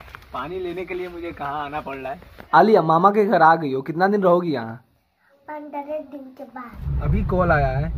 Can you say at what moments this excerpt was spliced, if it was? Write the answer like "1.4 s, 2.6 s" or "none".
2.4 s, 6.7 s

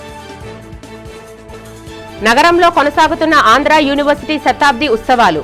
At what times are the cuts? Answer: 1.5 s

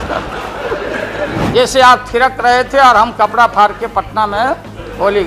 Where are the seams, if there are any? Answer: 1.4 s

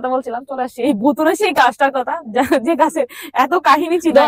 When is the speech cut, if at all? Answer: none

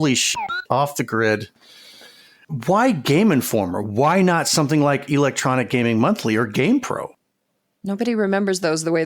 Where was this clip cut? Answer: 2.5 s

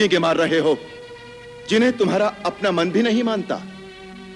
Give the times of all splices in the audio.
none

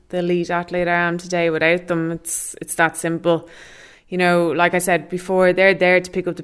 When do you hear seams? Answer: none

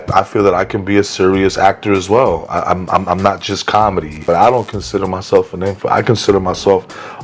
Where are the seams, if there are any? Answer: 4.2 s

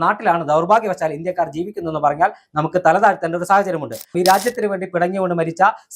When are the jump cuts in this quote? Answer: 4.1 s

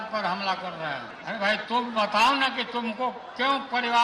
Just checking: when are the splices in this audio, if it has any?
1.1 s

